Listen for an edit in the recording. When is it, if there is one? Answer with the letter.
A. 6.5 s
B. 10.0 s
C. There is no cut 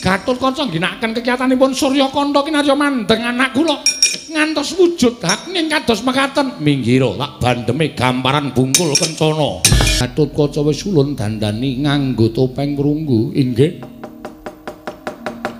B